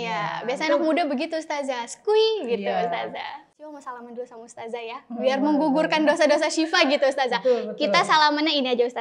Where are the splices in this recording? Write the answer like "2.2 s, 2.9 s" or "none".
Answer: 3.4 s